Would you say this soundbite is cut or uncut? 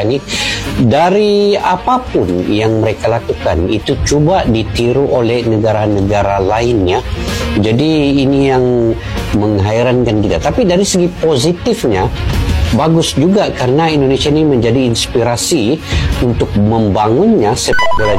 uncut